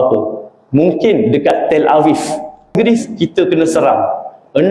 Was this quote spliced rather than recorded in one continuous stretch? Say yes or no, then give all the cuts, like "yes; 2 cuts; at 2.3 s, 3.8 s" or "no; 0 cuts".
yes; 1 cut; at 2.7 s